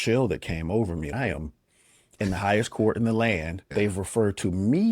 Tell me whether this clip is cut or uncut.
cut